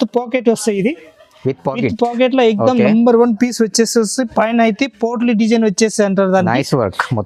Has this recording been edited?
no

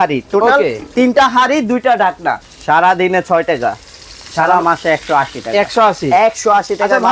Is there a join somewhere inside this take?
yes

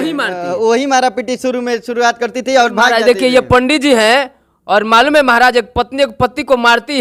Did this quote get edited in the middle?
no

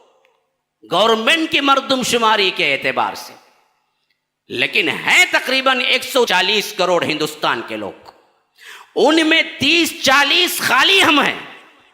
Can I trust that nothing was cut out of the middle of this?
no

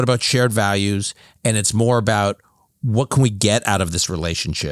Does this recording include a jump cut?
no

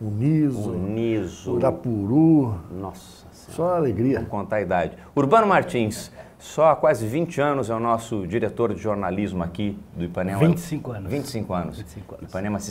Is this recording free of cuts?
yes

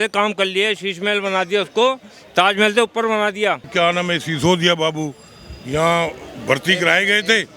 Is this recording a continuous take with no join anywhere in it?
no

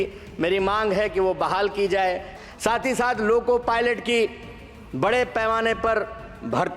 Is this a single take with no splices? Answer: no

